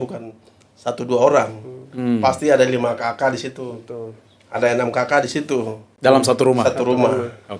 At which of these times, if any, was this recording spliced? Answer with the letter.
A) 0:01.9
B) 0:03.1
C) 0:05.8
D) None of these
D